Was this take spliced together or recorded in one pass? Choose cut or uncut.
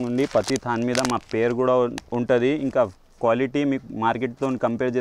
uncut